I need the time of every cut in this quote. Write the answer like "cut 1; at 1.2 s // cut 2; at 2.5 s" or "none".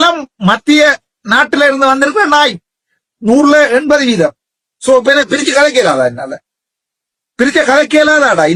none